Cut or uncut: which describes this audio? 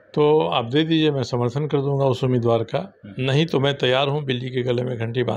uncut